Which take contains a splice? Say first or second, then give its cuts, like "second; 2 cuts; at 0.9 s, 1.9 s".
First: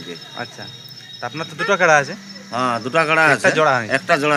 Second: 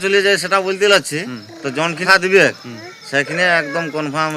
second; 1 cut; at 2.0 s